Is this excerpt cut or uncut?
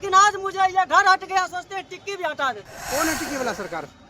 uncut